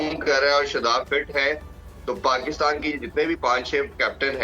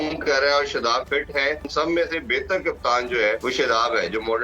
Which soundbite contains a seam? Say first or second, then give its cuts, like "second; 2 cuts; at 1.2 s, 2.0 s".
second; 2 cuts; at 1.7 s, 3.4 s